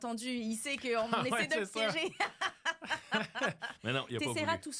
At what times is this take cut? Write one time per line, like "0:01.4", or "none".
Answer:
none